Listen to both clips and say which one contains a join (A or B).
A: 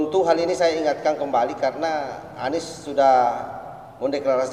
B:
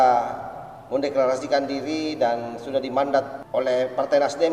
B